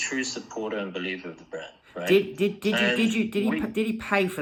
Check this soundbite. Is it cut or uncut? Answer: uncut